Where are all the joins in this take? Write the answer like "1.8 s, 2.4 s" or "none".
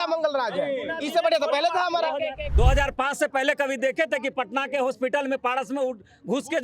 2.4 s